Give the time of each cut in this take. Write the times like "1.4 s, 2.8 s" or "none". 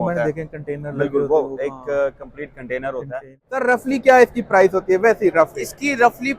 3.6 s